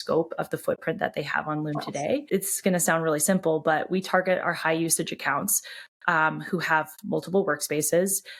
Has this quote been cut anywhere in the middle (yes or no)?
yes